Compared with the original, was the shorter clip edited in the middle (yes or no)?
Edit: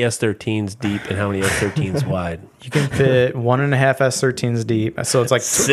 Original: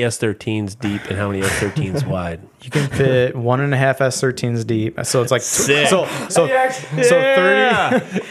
no